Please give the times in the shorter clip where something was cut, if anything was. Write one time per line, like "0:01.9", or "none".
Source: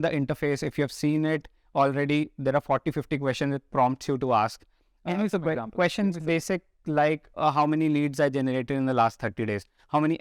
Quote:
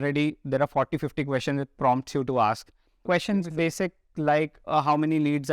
0:03.0

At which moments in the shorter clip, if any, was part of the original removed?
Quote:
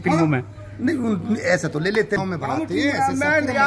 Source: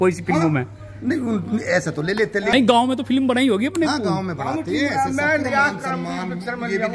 0:02.2

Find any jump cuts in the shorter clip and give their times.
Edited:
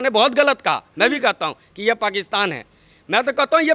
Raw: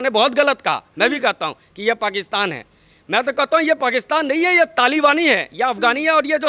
none

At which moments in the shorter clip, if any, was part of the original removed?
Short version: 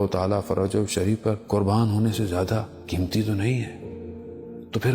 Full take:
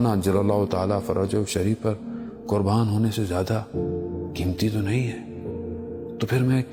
0:01.4
0:02.7

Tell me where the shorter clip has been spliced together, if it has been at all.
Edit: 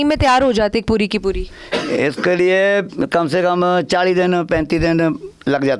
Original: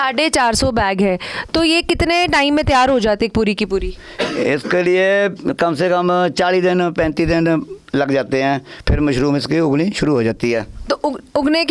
none

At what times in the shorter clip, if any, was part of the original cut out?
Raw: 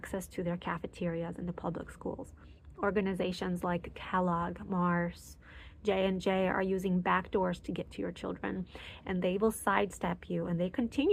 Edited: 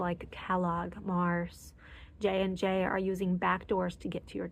none

